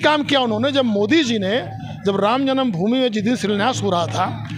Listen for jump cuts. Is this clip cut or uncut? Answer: uncut